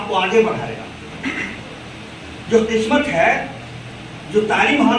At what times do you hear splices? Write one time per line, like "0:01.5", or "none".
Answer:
none